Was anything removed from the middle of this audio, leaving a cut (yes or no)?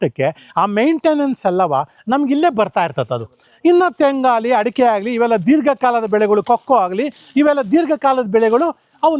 no